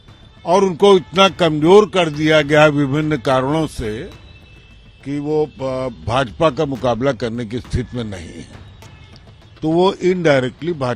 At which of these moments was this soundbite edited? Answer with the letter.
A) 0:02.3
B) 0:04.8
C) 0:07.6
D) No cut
D